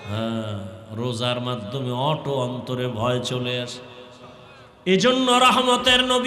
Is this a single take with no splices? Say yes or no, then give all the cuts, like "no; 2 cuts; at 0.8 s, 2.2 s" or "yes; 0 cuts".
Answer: no; 1 cut; at 4.2 s